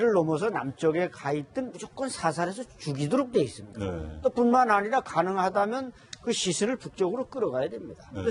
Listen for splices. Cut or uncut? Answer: uncut